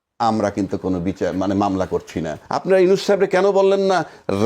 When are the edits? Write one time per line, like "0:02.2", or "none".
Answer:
0:02.4